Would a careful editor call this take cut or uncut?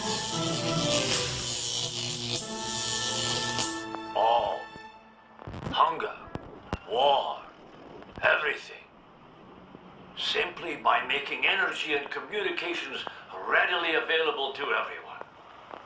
cut